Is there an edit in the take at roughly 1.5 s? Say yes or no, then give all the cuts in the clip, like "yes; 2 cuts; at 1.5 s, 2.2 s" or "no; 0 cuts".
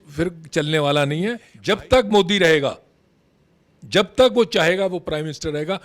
yes; 1 cut; at 1.5 s